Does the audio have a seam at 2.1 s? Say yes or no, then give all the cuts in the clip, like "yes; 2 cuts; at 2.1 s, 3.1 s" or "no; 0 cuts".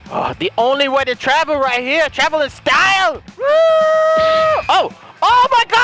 no; 2 cuts; at 3.3 s, 4.6 s